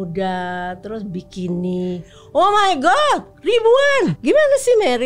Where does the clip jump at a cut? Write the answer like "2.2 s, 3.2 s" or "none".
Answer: 4.2 s